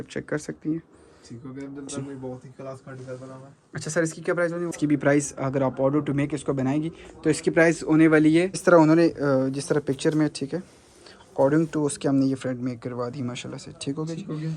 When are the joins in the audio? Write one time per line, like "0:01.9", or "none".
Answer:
0:04.7
0:08.6